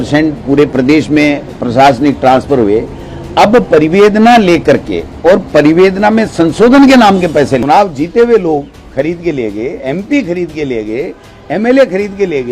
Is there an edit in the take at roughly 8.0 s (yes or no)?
yes